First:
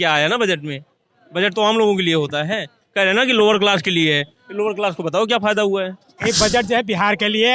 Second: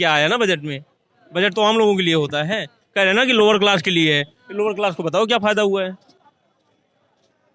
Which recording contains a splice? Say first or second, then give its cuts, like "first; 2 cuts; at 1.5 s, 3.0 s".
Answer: first; 1 cut; at 6.1 s